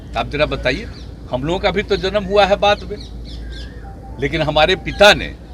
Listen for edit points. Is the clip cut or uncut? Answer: uncut